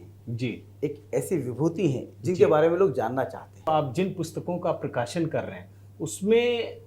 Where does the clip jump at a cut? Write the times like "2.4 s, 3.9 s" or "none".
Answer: 3.7 s